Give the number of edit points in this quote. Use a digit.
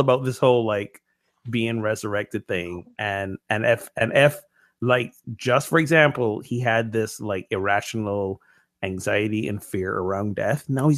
0